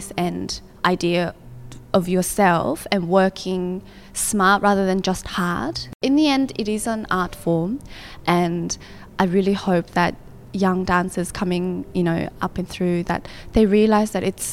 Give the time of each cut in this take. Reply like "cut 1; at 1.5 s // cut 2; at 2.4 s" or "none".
cut 1; at 5.8 s